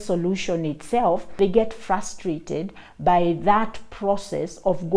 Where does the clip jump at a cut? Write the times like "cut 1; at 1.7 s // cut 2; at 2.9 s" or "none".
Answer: cut 1; at 1.3 s

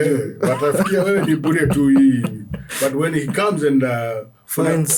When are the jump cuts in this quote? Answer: none

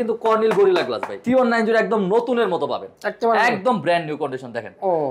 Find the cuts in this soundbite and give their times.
cut 1; at 1.1 s

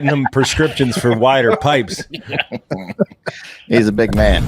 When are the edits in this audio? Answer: none

